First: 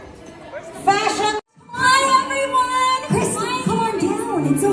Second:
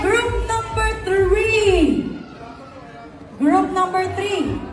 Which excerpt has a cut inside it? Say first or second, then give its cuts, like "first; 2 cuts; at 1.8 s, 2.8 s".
first; 1 cut; at 1.6 s